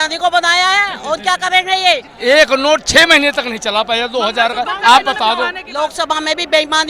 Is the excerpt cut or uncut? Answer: cut